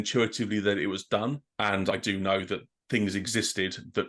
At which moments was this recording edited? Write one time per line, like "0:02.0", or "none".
0:01.9